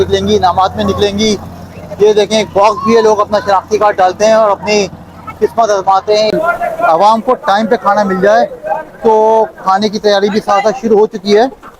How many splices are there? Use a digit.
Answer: 1